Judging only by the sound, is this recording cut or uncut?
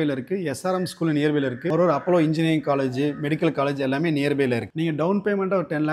cut